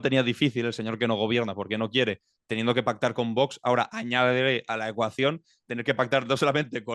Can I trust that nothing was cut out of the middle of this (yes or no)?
yes